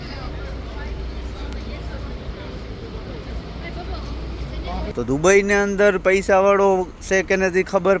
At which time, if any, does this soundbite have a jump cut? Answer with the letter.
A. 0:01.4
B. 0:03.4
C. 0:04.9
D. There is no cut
C